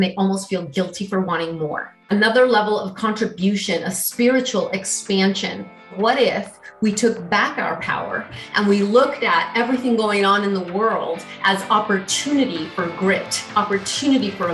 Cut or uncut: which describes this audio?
cut